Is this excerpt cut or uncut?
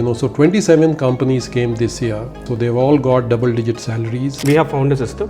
cut